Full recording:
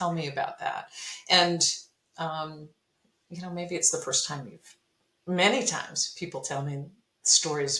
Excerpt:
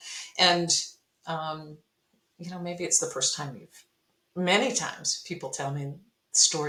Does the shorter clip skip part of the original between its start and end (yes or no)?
no